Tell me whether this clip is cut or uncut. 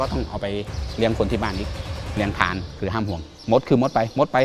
cut